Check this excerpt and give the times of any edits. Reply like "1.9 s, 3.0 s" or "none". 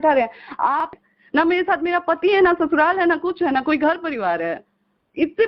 0.9 s